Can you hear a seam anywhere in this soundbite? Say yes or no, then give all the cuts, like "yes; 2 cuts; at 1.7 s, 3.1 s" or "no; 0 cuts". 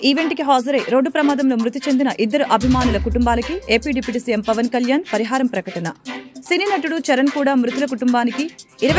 no; 0 cuts